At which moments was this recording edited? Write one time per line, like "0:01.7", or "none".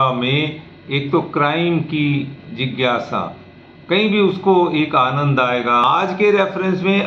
0:05.8